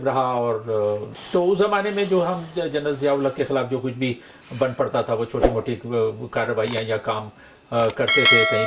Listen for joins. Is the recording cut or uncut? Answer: cut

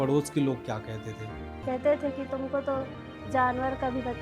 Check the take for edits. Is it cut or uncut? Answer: cut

